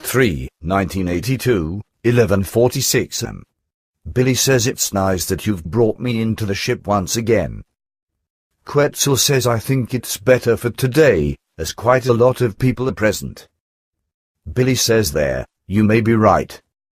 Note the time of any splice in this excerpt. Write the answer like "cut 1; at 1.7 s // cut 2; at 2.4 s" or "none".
cut 1; at 14.8 s